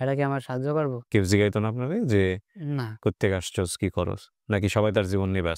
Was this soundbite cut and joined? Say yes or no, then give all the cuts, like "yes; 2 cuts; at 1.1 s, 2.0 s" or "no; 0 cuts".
no; 0 cuts